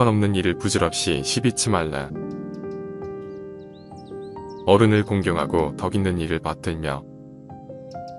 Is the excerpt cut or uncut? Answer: cut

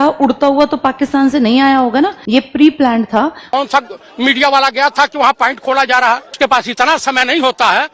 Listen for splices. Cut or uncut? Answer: cut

